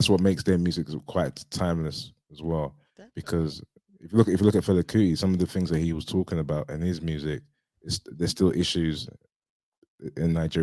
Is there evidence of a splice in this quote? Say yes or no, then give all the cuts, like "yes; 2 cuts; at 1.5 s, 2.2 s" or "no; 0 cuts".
no; 0 cuts